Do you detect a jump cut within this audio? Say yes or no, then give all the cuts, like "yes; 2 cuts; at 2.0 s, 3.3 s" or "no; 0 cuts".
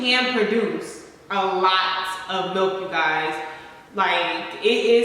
no; 0 cuts